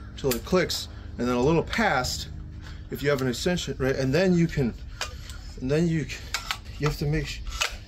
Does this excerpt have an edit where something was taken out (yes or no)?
yes